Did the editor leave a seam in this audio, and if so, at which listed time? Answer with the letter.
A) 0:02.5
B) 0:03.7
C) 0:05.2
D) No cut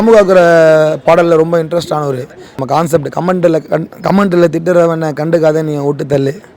A